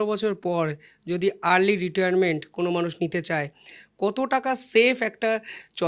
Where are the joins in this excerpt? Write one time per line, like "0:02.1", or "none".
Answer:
none